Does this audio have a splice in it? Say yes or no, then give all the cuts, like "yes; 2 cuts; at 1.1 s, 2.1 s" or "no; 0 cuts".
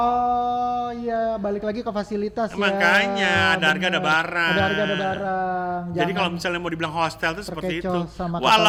no; 0 cuts